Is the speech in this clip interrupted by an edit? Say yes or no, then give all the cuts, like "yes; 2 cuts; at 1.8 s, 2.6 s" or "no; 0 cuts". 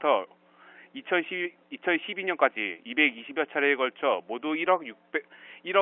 no; 0 cuts